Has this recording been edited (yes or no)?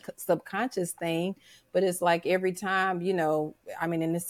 no